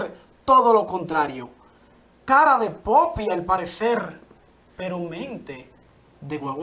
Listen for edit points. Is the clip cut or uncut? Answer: uncut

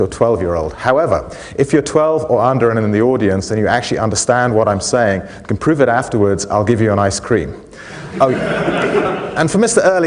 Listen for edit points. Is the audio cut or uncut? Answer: uncut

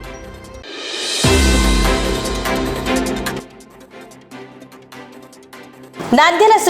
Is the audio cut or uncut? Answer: cut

